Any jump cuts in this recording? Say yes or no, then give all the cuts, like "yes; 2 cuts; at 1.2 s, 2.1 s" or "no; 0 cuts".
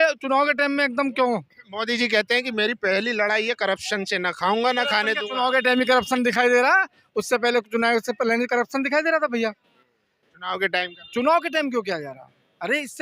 no; 0 cuts